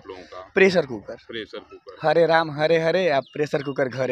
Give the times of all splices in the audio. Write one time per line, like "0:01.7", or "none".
none